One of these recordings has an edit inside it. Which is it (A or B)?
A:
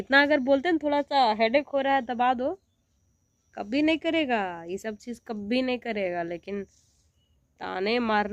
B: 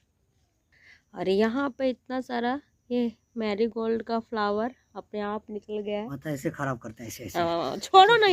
B